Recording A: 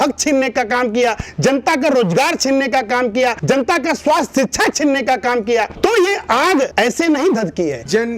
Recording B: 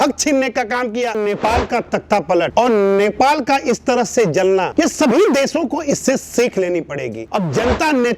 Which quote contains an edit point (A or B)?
B